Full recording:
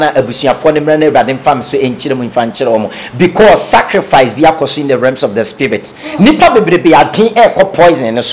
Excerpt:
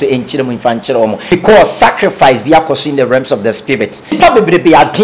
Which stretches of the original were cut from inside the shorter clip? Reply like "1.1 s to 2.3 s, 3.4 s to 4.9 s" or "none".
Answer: 3.0 s to 3.2 s, 6.1 s to 6.4 s